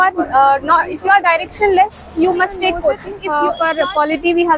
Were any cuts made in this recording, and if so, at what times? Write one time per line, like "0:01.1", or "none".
0:03.1